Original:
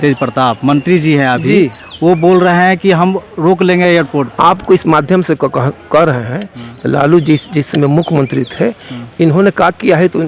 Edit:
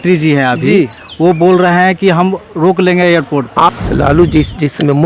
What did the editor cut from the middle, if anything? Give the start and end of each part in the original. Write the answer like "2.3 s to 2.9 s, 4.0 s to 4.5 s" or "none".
4.6 s to 6.7 s